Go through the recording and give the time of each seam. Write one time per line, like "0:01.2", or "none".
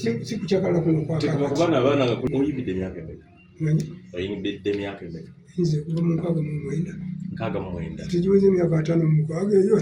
0:02.2

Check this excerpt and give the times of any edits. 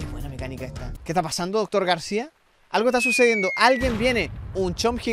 0:00.9

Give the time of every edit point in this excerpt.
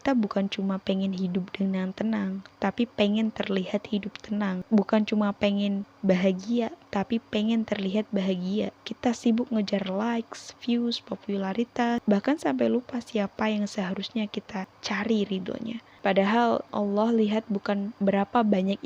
0:04.6
0:05.9
0:08.8
0:12.0
0:14.7
0:15.8
0:16.7
0:17.9

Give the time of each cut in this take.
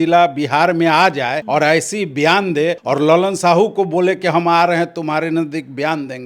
0:01.4
0:02.8

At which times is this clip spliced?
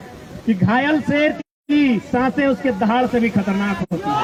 none

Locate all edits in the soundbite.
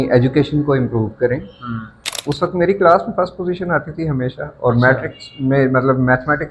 0:02.1

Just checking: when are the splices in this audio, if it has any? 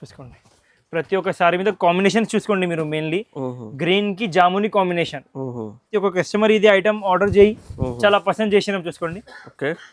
0:05.9

